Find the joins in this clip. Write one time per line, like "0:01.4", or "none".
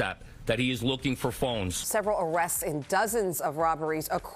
0:01.7